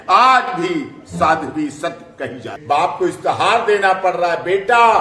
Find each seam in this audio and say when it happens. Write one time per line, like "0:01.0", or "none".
0:02.6